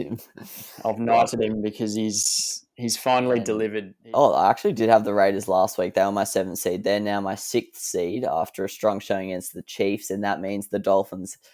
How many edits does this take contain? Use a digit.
1